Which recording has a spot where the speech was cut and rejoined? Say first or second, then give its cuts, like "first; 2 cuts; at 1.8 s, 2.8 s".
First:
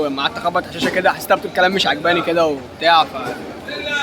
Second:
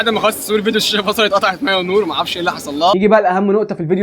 second; 1 cut; at 2.9 s